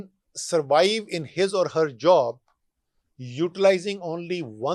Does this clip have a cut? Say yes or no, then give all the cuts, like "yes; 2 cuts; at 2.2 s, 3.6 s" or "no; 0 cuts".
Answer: no; 0 cuts